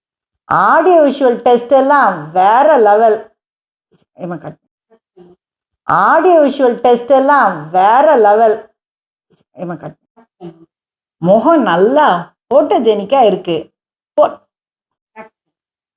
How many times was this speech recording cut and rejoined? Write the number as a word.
one